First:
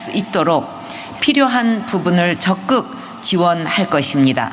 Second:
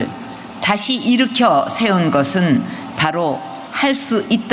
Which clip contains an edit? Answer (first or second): first